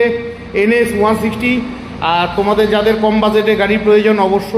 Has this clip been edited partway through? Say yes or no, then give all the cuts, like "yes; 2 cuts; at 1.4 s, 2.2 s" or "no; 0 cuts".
no; 0 cuts